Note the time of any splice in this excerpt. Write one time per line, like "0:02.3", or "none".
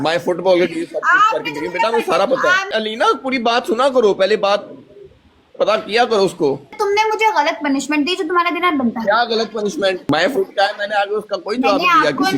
0:02.7
0:06.7
0:10.0